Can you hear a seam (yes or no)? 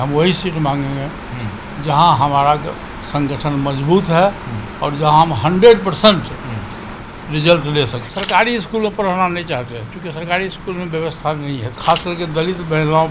yes